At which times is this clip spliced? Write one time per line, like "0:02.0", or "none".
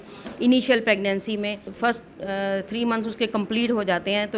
0:01.6